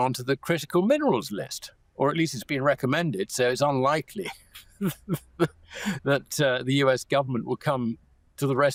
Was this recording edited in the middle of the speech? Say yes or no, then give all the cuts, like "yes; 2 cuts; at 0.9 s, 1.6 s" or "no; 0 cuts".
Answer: no; 0 cuts